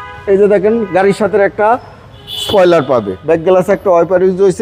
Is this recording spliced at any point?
yes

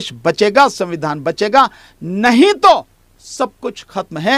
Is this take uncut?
yes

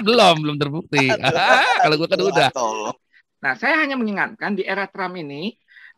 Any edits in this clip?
yes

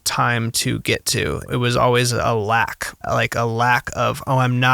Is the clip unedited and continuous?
no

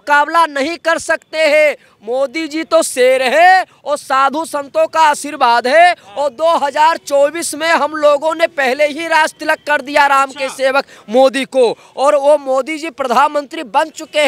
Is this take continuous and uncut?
yes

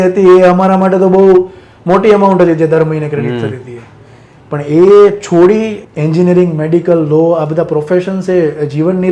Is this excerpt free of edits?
no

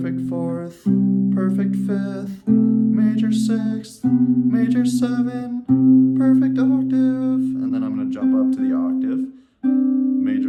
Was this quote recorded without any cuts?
yes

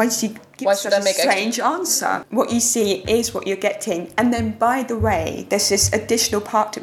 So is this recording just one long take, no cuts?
no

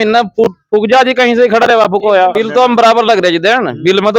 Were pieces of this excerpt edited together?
yes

